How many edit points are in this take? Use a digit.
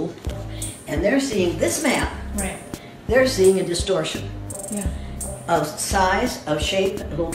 0